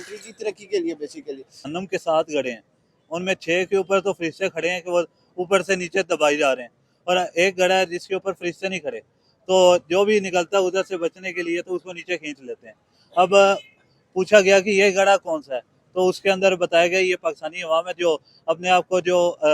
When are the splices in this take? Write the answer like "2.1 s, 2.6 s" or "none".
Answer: 1.7 s